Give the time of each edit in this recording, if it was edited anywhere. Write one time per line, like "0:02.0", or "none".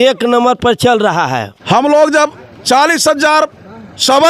0:01.5